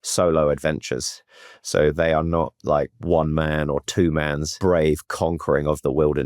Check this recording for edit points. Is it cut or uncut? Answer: cut